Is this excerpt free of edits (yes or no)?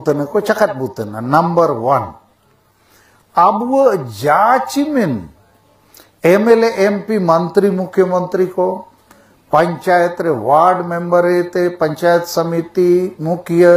yes